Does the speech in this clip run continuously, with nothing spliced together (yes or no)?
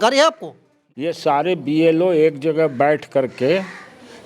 no